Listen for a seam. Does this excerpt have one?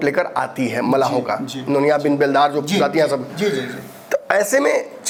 no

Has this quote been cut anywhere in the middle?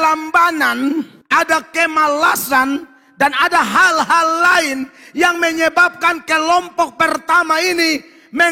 yes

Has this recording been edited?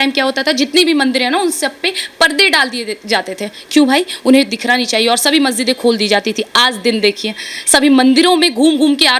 no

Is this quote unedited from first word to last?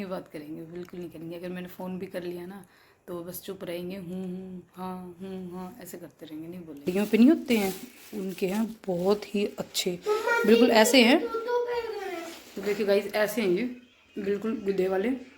no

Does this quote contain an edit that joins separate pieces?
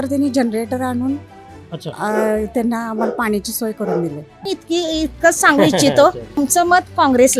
yes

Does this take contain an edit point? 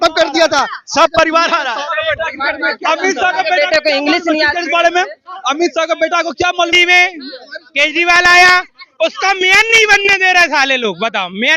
yes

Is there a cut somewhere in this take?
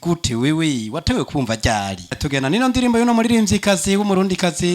yes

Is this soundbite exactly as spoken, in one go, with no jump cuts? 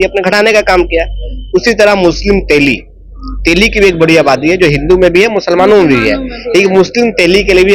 yes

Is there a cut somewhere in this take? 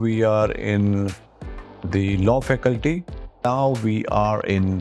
yes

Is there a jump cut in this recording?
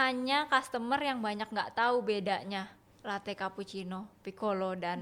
no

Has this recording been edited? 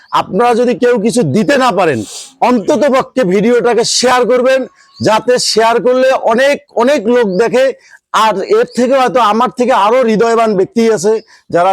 no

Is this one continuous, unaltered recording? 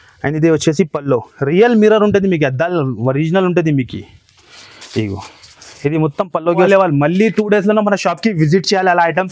no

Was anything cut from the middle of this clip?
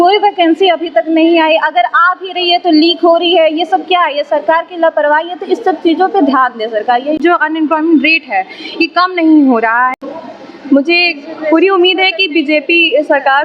yes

